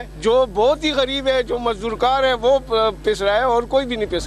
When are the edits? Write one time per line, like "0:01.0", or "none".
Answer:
none